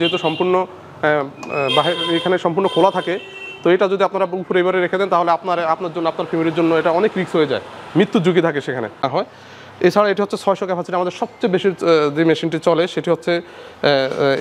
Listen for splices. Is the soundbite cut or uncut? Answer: cut